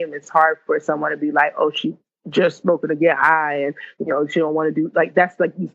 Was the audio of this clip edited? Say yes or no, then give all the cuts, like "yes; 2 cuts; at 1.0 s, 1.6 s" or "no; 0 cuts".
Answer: no; 0 cuts